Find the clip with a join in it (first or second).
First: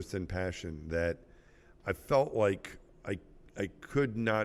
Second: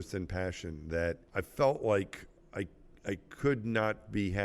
second